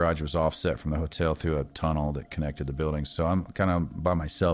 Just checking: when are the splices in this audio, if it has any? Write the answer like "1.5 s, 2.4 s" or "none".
none